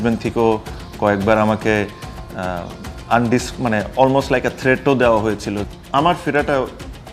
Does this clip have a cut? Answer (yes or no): yes